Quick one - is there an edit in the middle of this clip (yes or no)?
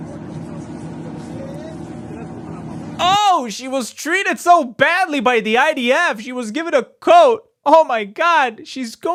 no